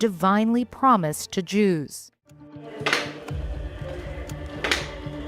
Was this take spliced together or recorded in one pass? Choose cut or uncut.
cut